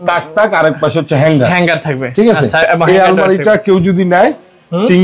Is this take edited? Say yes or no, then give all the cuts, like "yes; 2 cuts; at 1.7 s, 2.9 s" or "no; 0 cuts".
no; 0 cuts